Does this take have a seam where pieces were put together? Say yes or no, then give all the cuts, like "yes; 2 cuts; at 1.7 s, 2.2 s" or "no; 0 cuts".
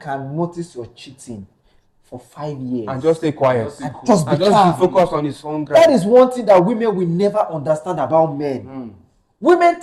no; 0 cuts